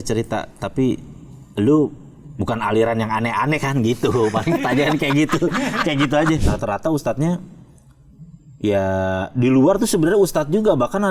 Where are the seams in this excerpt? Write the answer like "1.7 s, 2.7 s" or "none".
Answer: 6.5 s